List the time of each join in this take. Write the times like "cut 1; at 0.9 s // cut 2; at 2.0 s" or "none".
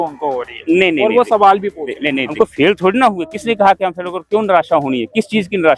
cut 1; at 2.3 s